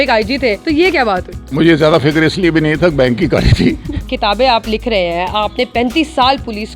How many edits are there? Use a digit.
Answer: 2